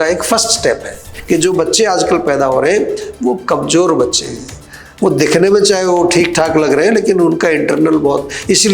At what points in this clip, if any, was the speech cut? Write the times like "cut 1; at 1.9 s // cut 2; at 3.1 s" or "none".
cut 1; at 1.1 s